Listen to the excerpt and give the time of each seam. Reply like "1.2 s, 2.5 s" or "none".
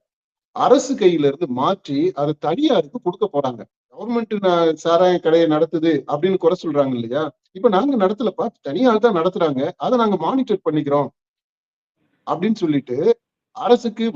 4.1 s